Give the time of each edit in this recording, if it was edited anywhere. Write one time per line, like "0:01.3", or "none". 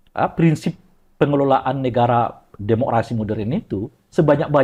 none